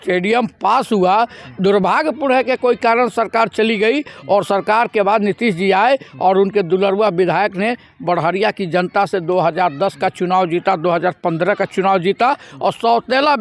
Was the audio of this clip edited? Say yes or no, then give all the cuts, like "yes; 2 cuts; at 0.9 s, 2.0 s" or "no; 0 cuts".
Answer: no; 0 cuts